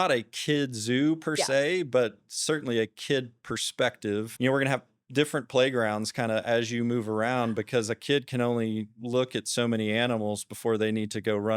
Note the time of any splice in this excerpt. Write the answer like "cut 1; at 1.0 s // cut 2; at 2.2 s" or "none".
cut 1; at 4.3 s

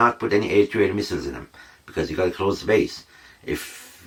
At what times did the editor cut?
none

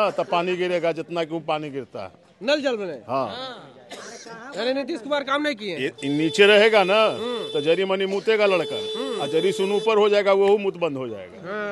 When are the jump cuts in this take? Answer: none

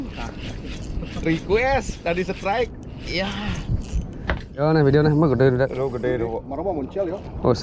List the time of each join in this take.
cut 1; at 4.5 s

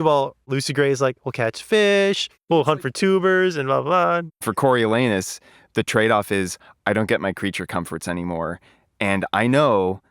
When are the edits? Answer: cut 1; at 2.5 s // cut 2; at 4.2 s

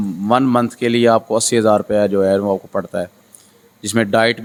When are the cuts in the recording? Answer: none

